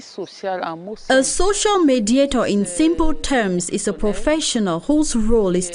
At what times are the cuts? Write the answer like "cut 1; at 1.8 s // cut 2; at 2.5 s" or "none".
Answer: cut 1; at 0.9 s